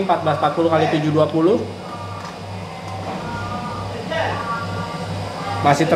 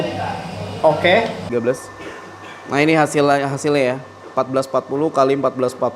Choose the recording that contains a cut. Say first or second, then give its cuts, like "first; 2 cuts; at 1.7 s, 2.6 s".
second; 1 cut; at 1.5 s